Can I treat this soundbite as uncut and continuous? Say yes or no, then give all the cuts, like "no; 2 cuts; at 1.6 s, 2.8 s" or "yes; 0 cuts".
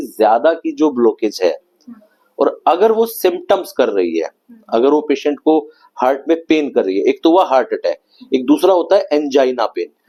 yes; 0 cuts